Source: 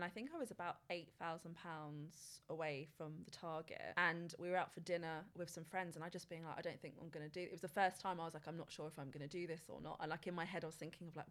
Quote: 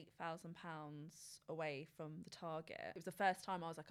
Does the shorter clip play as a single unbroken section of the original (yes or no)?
no